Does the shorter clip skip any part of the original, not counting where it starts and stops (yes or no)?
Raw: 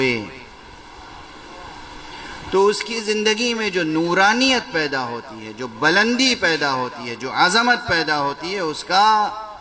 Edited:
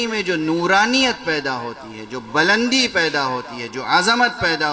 no